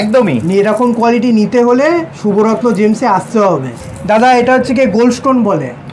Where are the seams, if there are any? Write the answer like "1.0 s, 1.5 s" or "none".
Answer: 3.8 s